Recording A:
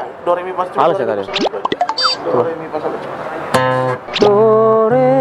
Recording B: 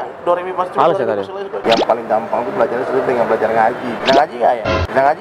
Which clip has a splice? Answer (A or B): B